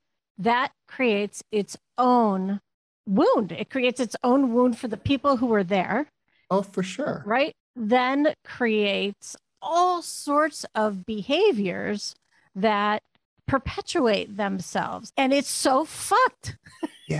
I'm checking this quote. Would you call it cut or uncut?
cut